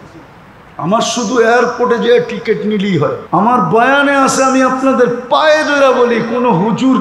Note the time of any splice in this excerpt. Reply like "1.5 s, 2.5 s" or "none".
3.2 s